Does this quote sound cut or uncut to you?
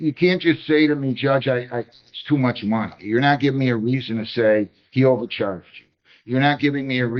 uncut